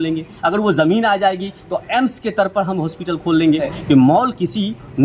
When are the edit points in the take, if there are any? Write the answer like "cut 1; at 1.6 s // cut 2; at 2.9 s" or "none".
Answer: cut 1; at 3.7 s